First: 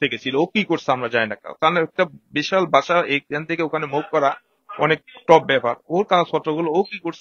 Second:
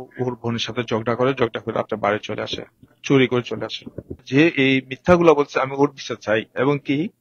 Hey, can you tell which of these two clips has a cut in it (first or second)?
second